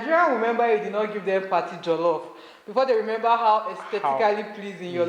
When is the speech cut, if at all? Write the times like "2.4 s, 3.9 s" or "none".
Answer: none